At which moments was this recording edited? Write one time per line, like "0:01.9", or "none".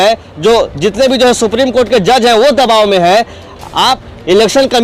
none